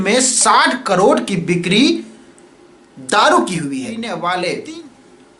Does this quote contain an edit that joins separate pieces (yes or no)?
yes